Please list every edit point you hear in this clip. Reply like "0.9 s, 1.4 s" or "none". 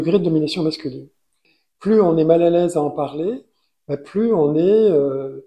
1.5 s